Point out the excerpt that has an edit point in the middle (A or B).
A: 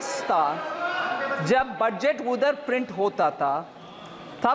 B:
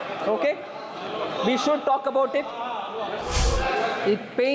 B